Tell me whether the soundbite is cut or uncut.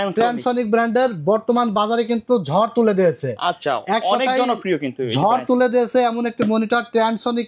uncut